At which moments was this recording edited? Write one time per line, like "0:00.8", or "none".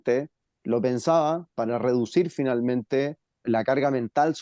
0:03.4

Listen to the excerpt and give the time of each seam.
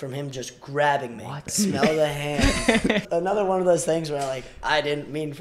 0:01.5
0:03.0

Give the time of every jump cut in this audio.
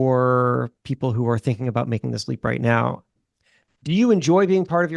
0:03.1

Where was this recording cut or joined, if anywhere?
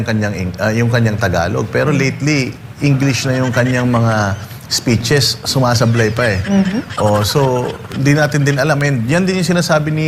none

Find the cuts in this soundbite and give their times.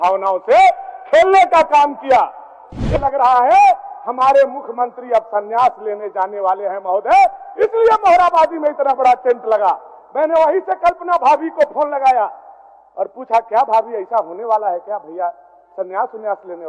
0:03.0

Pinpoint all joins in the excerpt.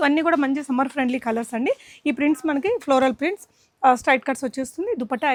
none

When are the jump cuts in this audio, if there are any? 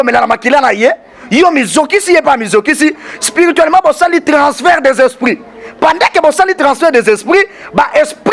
none

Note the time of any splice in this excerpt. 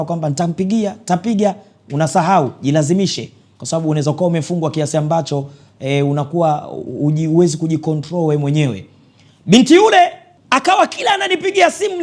0:10.3

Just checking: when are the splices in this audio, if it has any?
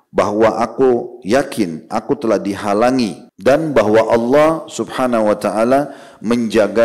0:03.3

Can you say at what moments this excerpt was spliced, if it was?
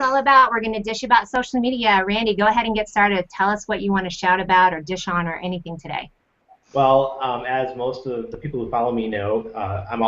0:04.8

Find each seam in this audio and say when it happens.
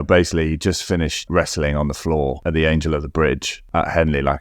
0:01.3
0:02.4
0:03.6

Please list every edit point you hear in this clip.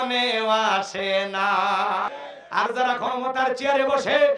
0:02.1

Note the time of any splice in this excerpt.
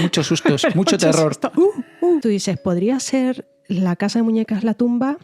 0:02.2

